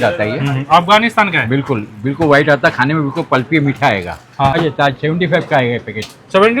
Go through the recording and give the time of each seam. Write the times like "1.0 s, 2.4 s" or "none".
4.6 s